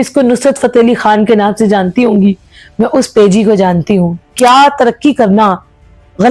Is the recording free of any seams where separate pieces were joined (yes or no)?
no